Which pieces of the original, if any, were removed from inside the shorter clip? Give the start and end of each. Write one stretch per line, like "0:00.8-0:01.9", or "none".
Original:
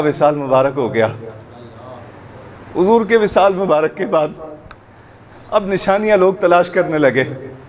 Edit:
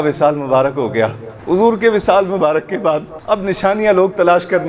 0:01.3-0:02.6
0:04.4-0:05.4